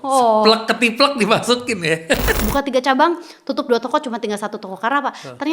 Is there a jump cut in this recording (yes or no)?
yes